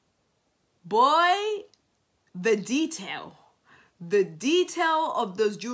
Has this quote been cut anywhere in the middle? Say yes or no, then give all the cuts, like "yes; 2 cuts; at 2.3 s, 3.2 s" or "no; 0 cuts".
no; 0 cuts